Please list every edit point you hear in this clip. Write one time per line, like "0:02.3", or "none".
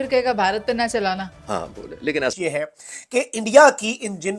0:02.3